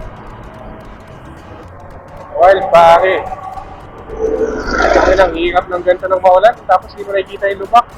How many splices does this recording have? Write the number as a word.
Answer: one